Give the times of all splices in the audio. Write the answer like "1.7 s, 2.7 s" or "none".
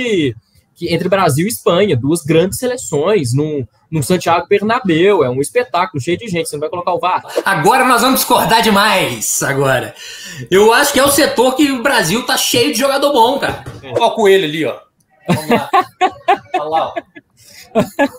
7.4 s, 13.8 s